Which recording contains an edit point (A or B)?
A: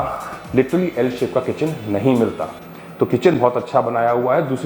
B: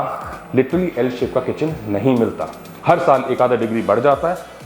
B